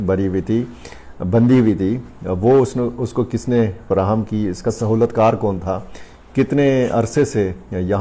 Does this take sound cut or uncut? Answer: uncut